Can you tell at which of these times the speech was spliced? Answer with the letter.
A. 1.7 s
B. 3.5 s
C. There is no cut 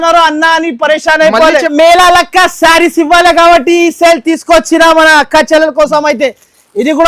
A